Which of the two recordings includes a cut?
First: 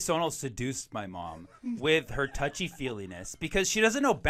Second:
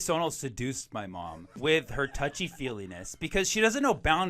second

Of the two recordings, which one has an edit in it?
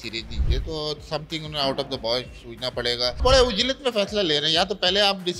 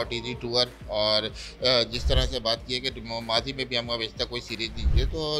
first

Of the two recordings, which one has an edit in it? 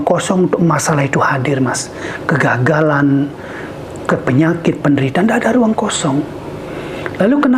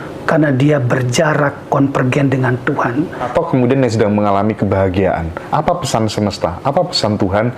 second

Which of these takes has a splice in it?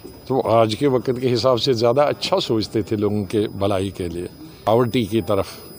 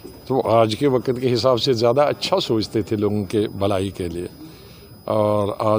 first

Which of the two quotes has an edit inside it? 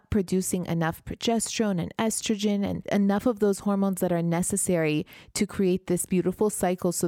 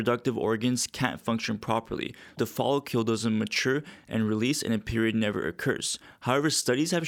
first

